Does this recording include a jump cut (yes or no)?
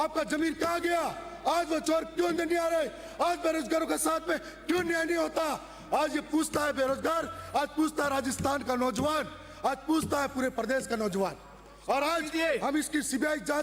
no